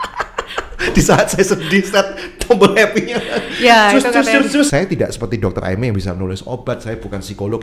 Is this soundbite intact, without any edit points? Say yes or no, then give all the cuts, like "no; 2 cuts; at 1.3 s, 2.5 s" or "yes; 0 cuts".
no; 1 cut; at 4.7 s